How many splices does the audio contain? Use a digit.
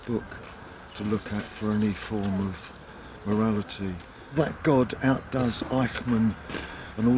1